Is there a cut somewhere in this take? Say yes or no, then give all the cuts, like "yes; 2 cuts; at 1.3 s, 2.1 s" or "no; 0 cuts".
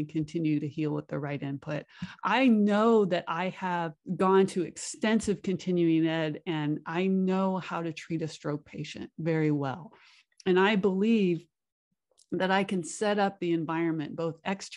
yes; 1 cut; at 4.0 s